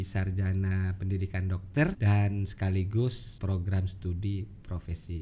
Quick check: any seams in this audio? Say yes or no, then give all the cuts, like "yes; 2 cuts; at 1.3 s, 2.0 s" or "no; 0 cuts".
yes; 2 cuts; at 2.0 s, 3.3 s